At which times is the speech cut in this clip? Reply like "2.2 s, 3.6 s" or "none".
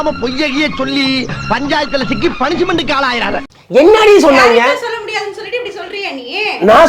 3.4 s

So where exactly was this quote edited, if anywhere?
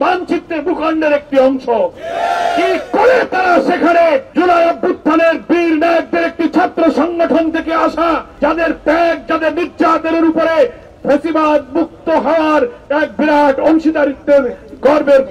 4.3 s, 8.3 s

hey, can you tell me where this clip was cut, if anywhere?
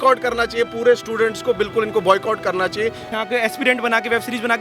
3.0 s

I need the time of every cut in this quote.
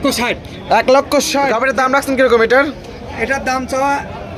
1.5 s

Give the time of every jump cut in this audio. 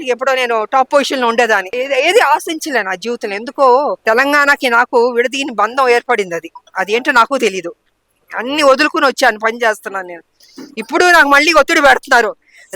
1.7 s, 4.0 s

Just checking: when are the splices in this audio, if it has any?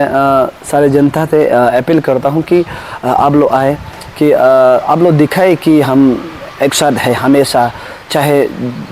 none

